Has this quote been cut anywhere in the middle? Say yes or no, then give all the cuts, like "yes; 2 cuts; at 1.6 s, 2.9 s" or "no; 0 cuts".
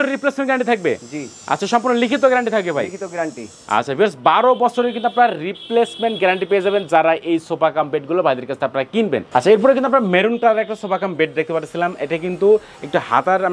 no; 0 cuts